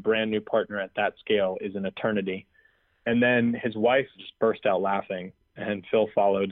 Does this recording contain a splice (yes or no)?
yes